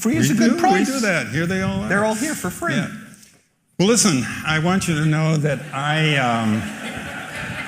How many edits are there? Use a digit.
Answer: 1